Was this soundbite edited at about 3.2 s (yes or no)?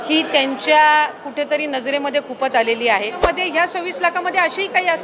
yes